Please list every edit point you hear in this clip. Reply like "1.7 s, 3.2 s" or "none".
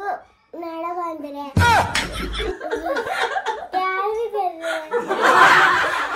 none